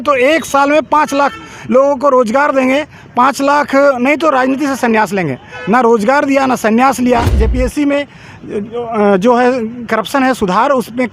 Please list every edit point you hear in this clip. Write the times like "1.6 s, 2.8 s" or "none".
7.4 s

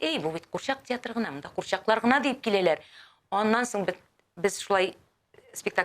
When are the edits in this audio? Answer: none

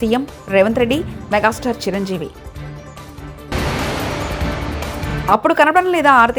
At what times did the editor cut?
none

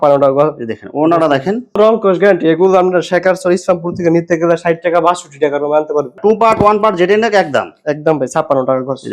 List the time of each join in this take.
1.8 s, 6.2 s

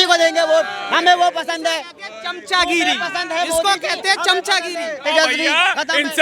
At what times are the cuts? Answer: none

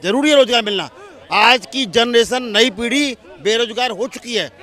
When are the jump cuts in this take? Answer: none

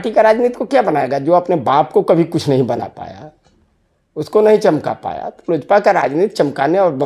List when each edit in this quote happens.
none

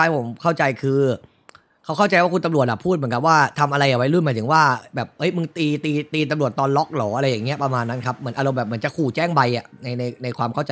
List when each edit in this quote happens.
none

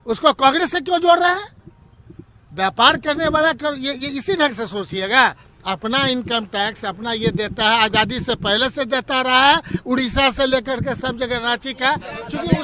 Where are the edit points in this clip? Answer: none

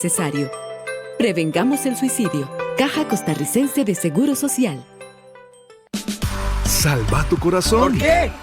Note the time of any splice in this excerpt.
6.9 s

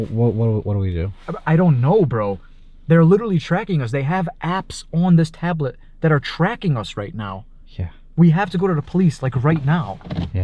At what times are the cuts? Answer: none

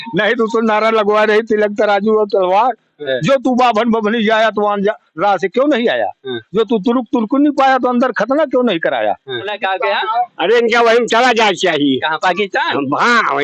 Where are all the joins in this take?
3.0 s, 9.5 s

